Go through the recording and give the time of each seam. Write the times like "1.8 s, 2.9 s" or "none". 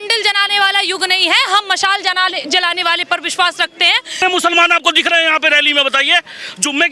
4.2 s